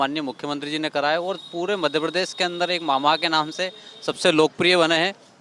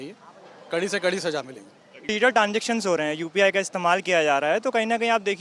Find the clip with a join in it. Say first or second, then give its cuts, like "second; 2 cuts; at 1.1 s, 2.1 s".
second; 1 cut; at 2.1 s